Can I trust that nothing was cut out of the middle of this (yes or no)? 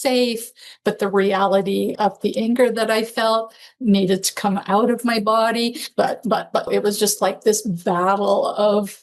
no